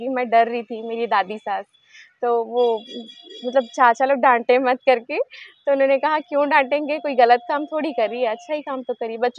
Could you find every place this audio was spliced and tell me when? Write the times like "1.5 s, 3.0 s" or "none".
none